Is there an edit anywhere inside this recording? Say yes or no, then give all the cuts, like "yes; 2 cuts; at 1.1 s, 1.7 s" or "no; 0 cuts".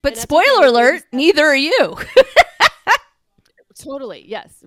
no; 0 cuts